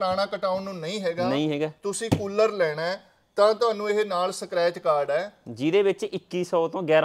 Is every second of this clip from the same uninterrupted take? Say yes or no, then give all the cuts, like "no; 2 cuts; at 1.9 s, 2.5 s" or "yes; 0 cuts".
yes; 0 cuts